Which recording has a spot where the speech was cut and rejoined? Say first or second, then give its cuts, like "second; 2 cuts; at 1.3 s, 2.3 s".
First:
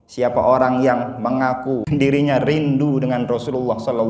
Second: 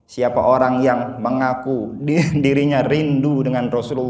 first; 1 cut; at 1.9 s